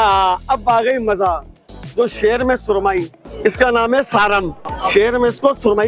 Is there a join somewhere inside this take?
yes; 2 cuts; at 3.2 s, 4.6 s

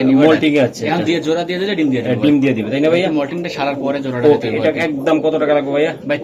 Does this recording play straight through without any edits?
yes; 0 cuts

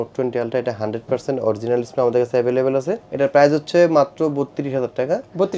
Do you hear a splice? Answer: no; 0 cuts

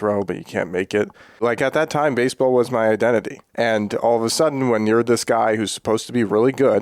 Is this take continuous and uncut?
no; 2 cuts; at 1.4 s, 3.4 s

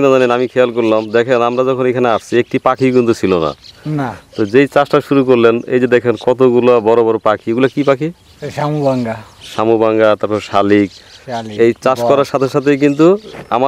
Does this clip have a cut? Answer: no; 0 cuts

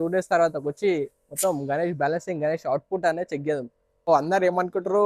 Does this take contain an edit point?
yes; 1 cut; at 4.1 s

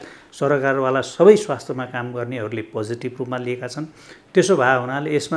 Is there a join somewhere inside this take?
no; 0 cuts

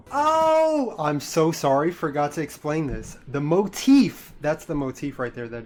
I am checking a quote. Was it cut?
no; 0 cuts

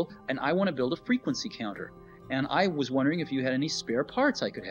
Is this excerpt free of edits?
yes; 0 cuts

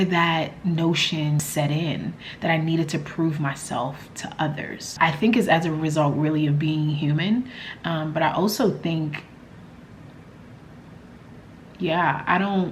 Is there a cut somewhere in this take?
yes; 1 cut; at 1.4 s

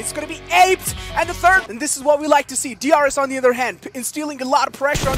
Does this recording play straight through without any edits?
no; 1 cut; at 1.7 s

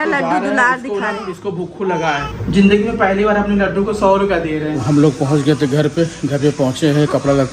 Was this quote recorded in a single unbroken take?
no; 2 cuts; at 2.3 s, 4.8 s

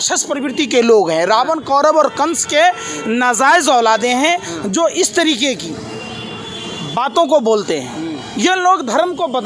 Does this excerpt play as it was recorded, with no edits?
yes; 0 cuts

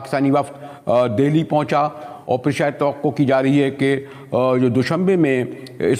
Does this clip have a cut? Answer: no; 0 cuts

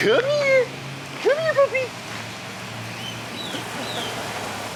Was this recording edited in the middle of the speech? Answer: no; 0 cuts

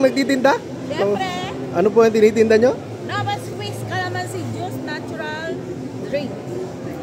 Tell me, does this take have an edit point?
no; 0 cuts

